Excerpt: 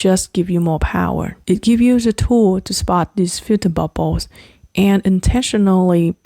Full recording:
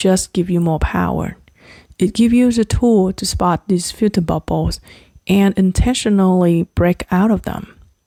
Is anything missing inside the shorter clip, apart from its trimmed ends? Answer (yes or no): yes